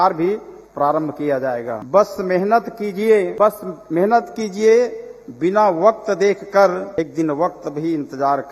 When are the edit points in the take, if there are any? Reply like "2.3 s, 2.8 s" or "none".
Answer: 1.8 s, 3.3 s, 7.0 s